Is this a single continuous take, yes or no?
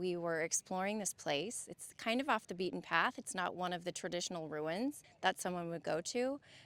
no